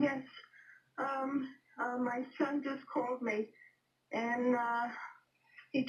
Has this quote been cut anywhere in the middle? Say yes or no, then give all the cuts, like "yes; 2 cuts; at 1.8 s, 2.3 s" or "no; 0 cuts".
no; 0 cuts